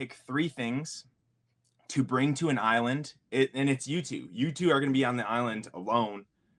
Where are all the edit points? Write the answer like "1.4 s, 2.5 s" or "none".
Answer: none